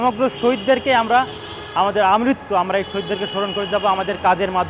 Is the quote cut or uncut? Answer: uncut